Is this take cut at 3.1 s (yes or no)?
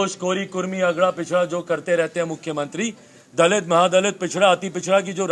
no